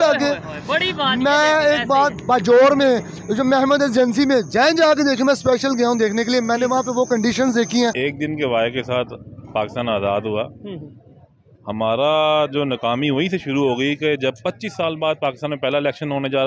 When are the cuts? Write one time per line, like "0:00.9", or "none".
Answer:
0:08.0

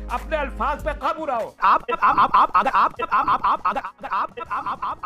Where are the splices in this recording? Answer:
none

